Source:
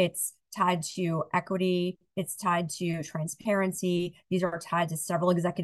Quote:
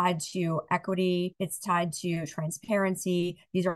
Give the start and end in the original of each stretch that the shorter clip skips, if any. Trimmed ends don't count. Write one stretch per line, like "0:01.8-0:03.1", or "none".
0:02.0-0:02.1